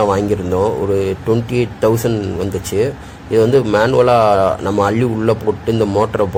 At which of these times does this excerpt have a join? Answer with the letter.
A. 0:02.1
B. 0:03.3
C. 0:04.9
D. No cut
D